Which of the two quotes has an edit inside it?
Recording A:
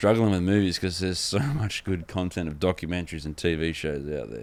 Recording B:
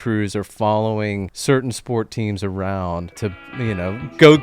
B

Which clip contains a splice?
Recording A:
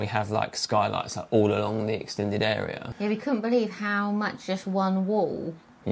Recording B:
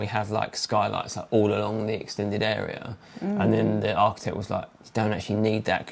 A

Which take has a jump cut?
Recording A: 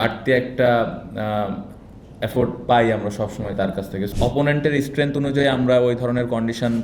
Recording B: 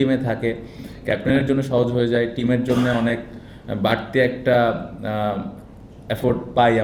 A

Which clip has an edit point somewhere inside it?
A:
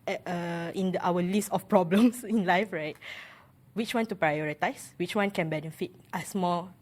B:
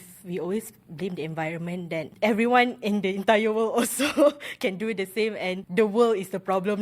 B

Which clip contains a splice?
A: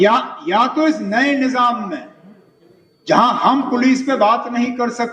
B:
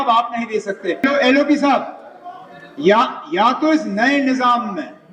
B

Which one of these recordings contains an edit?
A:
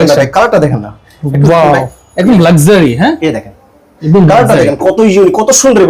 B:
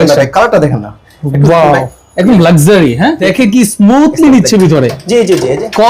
B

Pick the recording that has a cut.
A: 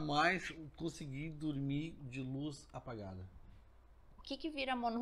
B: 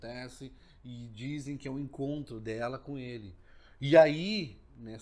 A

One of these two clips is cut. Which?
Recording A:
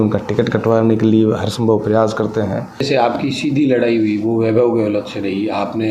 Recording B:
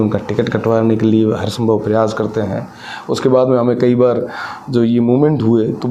A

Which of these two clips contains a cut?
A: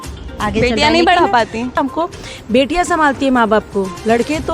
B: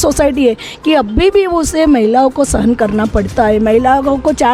A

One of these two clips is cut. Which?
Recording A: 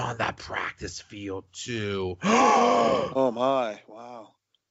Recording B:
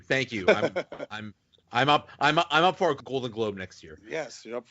B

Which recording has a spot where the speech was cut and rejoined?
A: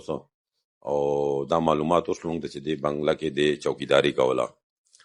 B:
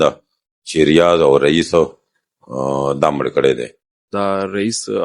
B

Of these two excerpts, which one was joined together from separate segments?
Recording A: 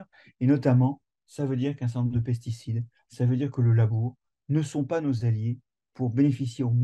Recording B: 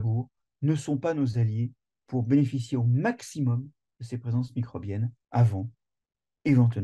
B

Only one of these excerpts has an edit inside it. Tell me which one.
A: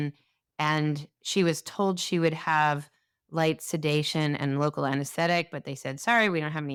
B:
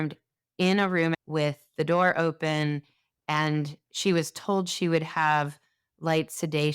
B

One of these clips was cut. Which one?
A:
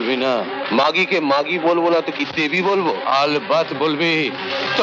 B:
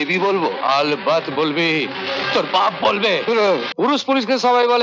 B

